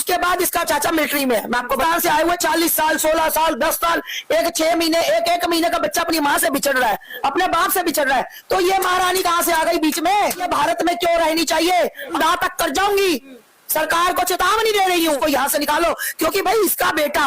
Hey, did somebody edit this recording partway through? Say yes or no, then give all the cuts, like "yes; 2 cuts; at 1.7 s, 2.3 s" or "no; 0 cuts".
yes; 2 cuts; at 1.8 s, 10.4 s